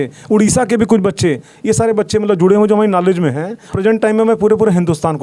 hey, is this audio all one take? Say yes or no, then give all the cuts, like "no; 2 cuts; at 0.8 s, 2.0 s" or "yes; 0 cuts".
no; 1 cut; at 3.7 s